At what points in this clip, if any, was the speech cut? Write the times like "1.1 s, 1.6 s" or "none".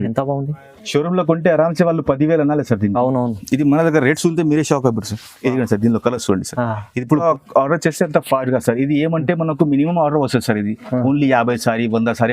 7.2 s